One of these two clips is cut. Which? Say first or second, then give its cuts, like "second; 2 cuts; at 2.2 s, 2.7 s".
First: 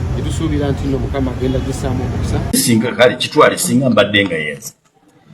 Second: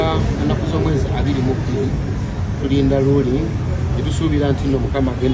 first; 1 cut; at 2.6 s